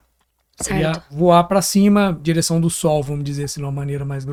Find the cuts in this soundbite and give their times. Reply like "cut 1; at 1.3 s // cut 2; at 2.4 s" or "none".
none

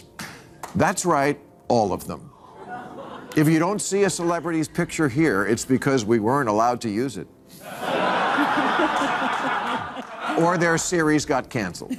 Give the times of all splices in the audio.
none

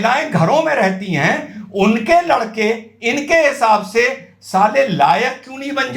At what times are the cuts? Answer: none

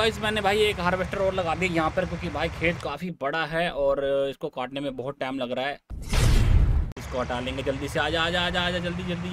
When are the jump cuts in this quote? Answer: cut 1; at 5.9 s // cut 2; at 6.9 s

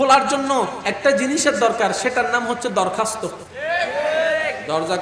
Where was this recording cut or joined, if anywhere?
cut 1; at 3.5 s

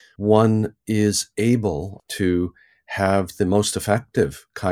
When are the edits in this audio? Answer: cut 1; at 1.9 s

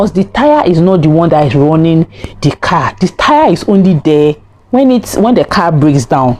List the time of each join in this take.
none

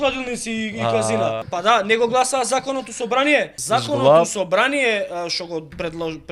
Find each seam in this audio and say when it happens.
cut 1; at 1.4 s // cut 2; at 3.5 s

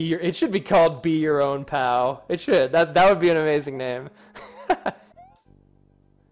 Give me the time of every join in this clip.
cut 1; at 5.1 s

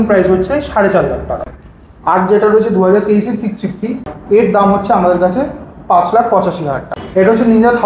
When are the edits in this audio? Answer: cut 1; at 1.4 s // cut 2; at 4.1 s // cut 3; at 6.8 s

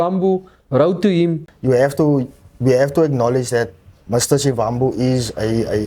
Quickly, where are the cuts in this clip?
cut 1; at 1.5 s

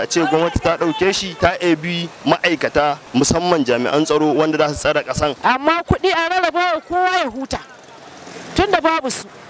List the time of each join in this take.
cut 1; at 1.3 s // cut 2; at 3.0 s // cut 3; at 5.4 s

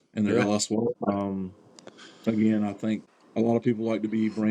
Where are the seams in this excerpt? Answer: cut 1; at 1.0 s // cut 2; at 3.2 s

